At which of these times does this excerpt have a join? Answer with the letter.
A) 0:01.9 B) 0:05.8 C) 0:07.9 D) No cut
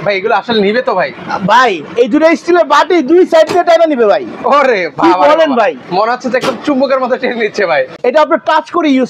C